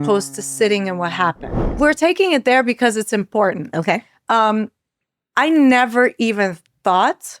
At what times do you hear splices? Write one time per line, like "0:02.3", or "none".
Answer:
0:01.7